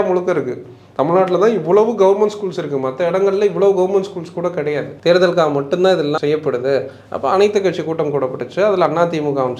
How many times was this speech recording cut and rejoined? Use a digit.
2